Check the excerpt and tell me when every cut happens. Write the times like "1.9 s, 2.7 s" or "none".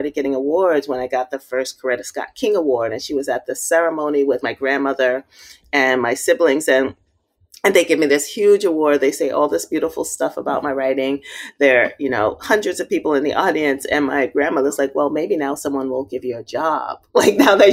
4.4 s